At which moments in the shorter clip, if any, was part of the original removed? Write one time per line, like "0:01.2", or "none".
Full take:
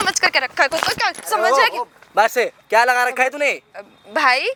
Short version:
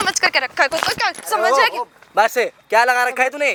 none